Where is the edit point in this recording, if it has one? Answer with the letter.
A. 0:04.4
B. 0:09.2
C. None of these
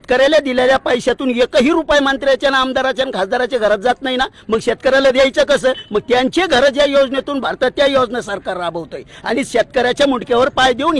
C